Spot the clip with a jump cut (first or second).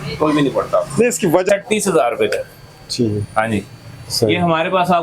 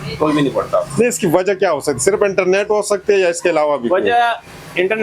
first